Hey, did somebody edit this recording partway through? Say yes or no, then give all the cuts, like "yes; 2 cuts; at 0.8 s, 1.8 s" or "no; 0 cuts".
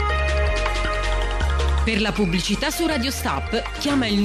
no; 0 cuts